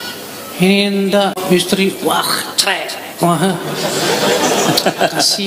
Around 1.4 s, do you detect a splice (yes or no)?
yes